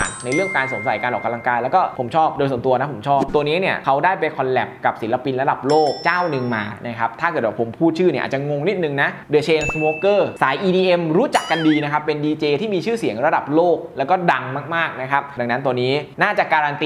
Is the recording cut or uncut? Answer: cut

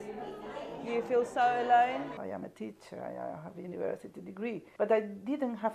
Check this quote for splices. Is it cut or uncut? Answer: cut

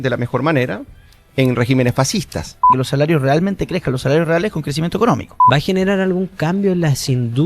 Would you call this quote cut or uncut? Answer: cut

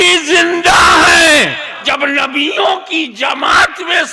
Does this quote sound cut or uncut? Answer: cut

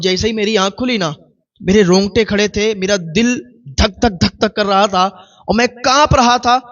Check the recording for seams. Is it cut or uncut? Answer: uncut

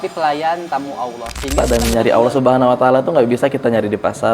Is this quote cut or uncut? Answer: cut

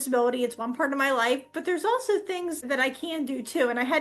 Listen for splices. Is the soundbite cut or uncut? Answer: cut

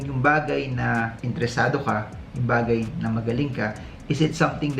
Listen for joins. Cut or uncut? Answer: uncut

